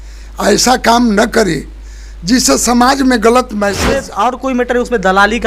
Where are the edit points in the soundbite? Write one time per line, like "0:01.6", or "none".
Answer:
0:04.1

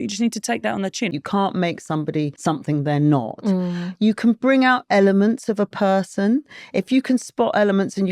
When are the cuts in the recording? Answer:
0:01.1
0:02.3

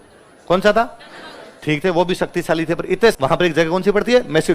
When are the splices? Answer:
0:03.2

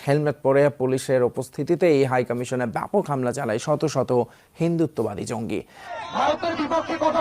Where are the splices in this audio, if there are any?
0:05.9

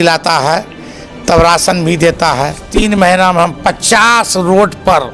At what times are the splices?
0:02.7

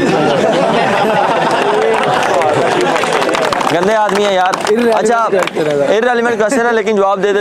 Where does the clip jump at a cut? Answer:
none

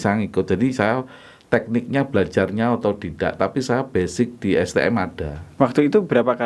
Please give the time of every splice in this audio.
0:05.4

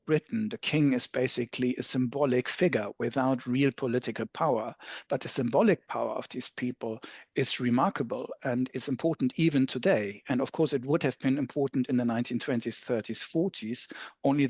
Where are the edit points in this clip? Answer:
none

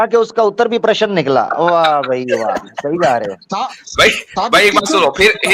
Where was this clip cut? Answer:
none

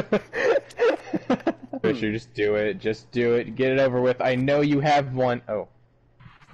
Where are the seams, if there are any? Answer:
0:01.8

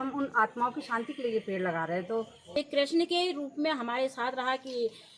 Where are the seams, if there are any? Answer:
0:02.5

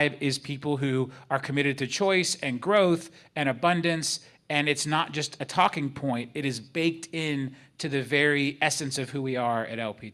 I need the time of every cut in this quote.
none

